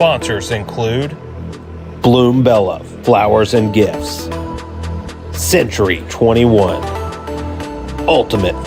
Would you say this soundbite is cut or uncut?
cut